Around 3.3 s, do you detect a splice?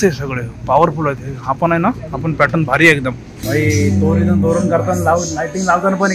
yes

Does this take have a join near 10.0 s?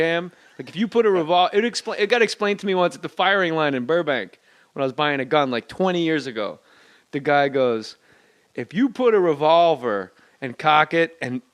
yes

